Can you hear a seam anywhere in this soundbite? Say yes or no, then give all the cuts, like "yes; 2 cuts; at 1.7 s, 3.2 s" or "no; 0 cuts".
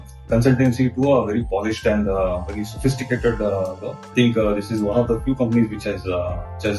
no; 0 cuts